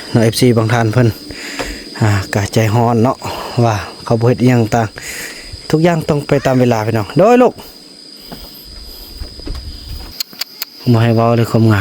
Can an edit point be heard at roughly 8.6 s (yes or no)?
no